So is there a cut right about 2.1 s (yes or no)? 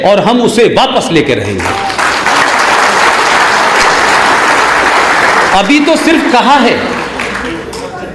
no